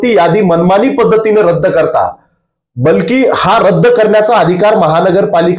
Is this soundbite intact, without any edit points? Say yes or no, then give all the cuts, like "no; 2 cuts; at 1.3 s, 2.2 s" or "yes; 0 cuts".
yes; 0 cuts